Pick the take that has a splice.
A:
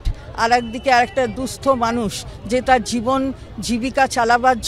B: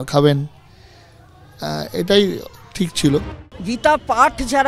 B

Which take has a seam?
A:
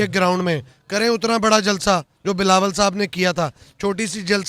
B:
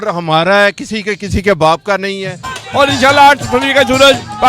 B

